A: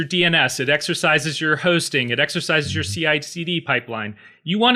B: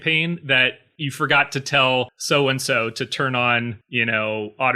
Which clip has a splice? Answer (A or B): B